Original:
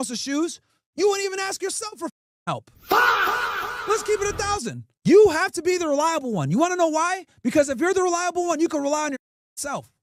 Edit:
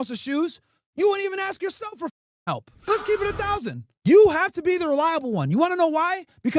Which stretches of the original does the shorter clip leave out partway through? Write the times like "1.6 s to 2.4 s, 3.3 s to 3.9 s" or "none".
2.7 s to 3.7 s